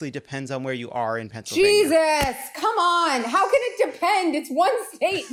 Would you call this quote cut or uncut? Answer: uncut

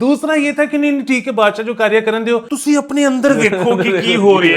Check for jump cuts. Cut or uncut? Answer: cut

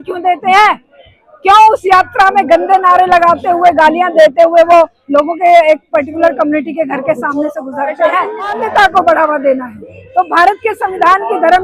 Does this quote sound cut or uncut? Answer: cut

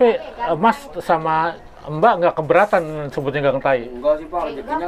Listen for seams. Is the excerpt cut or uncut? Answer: uncut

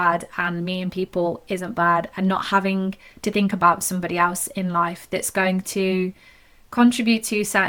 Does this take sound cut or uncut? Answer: uncut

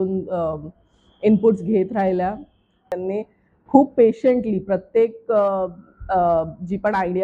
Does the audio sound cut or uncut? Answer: cut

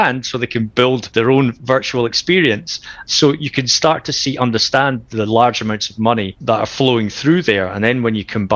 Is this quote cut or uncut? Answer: cut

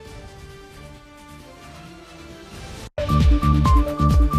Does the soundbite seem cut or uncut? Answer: uncut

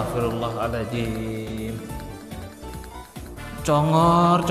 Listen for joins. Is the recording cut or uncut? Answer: uncut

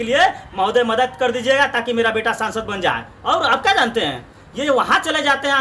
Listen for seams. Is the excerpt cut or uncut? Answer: uncut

